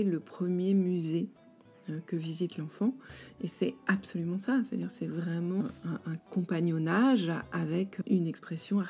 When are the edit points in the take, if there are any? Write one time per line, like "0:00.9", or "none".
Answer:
0:05.6
0:08.0